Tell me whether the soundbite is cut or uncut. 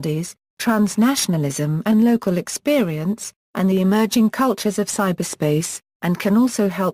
cut